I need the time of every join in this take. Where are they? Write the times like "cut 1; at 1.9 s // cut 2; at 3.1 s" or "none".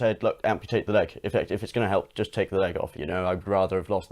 cut 1; at 3.0 s